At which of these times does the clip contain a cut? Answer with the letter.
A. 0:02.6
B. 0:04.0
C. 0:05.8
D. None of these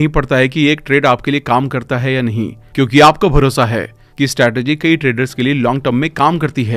D